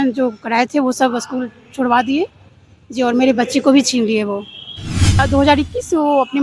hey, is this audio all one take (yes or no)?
no